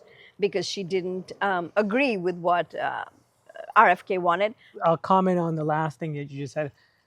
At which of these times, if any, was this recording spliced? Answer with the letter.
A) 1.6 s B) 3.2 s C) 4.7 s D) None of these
C